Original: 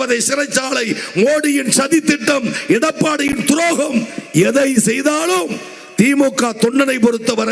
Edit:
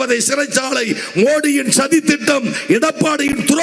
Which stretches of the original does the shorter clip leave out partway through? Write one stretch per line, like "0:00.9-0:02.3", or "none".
none